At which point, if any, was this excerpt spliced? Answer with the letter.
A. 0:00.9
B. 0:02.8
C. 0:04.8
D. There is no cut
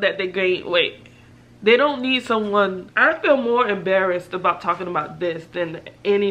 B